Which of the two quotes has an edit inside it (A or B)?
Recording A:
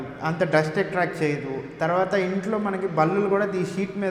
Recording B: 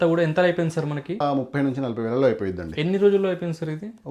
B